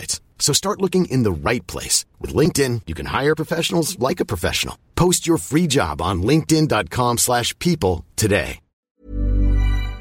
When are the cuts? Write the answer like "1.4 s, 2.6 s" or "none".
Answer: 9.0 s